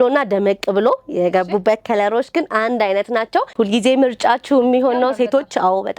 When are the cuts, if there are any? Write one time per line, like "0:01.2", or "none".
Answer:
0:03.5